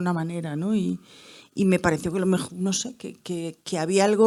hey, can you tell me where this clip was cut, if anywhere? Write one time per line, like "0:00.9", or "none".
none